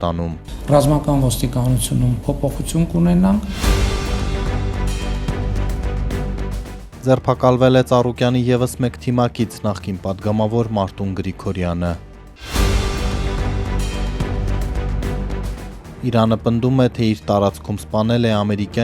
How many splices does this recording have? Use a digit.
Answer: 1